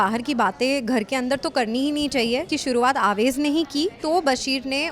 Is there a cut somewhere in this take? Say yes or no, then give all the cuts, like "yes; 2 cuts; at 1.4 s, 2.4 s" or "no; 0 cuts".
yes; 2 cuts; at 2.5 s, 4.0 s